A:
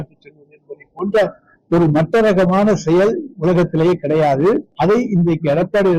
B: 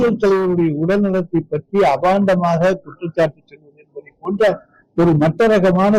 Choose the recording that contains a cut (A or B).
A